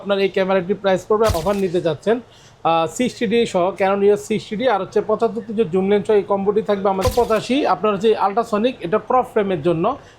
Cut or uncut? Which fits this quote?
cut